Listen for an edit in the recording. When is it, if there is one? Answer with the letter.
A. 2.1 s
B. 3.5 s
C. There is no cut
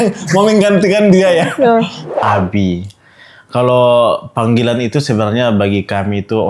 A